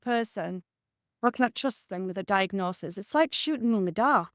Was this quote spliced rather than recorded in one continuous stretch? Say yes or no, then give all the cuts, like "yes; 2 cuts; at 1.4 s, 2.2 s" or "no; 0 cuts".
no; 0 cuts